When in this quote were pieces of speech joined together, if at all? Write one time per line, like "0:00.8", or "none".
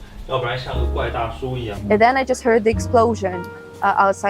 0:01.8